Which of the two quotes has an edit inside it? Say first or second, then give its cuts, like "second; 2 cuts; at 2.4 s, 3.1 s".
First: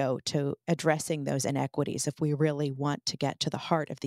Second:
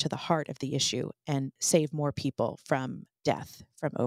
second; 2 cuts; at 1.6 s, 3.1 s